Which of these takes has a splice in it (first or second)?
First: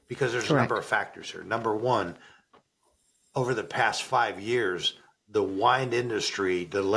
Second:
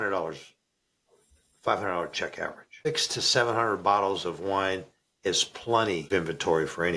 second